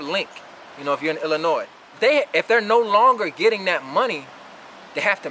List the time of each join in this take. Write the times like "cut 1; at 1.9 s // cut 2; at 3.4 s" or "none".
cut 1; at 1.8 s